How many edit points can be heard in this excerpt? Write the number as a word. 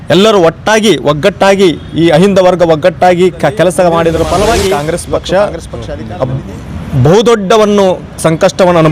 one